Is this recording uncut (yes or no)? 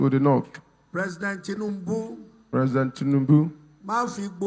yes